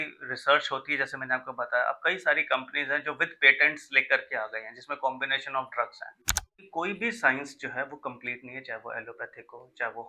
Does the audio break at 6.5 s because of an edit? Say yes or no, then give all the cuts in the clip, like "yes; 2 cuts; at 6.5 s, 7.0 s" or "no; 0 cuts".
yes; 1 cut; at 6.5 s